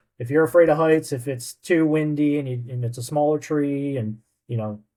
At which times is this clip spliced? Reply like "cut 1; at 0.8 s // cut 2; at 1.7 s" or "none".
none